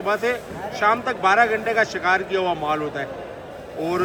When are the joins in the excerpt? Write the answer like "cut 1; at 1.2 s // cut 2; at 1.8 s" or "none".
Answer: none